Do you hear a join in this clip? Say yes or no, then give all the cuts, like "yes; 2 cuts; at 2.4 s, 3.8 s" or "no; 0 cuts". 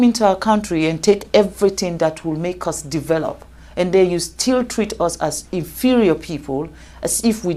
no; 0 cuts